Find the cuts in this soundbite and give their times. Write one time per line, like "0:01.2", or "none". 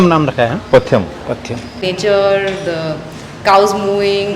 0:01.8

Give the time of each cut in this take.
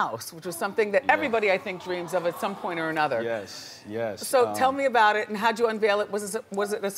0:04.5

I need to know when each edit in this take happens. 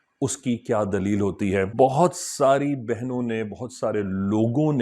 0:01.7

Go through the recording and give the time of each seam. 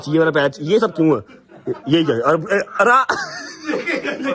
0:02.5

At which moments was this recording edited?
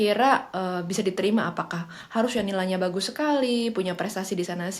none

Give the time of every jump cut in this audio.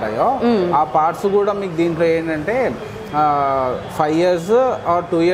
none

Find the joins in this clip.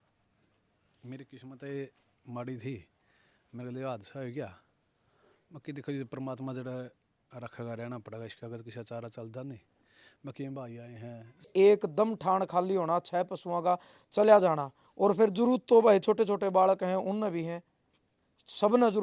0:11.5

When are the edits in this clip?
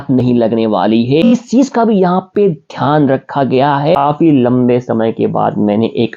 0:01.2
0:04.0

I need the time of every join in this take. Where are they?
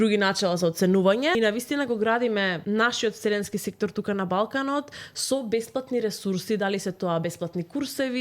0:01.3
0:02.6

